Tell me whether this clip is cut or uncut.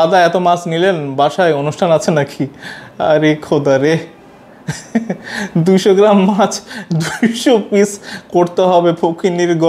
uncut